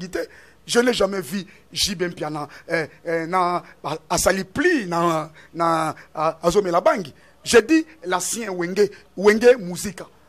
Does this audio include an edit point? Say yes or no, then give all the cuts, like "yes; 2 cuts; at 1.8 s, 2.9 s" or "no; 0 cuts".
no; 0 cuts